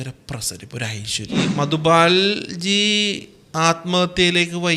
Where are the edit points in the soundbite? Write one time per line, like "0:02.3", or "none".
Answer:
0:01.5